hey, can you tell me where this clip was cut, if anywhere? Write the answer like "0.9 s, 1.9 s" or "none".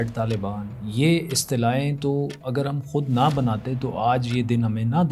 none